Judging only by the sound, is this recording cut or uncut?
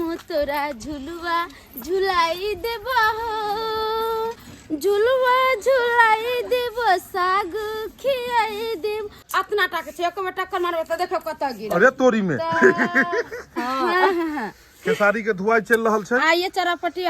cut